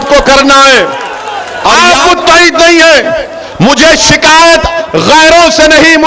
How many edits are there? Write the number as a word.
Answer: one